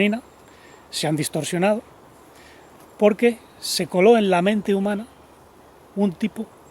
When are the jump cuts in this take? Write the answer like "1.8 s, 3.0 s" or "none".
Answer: none